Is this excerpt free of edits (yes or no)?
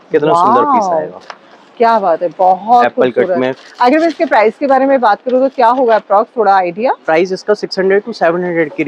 yes